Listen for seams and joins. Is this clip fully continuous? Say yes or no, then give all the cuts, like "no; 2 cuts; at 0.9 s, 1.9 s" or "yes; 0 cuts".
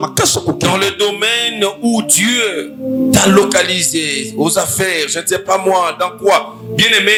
yes; 0 cuts